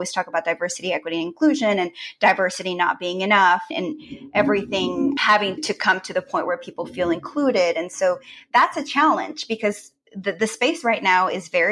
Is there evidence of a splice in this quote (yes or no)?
no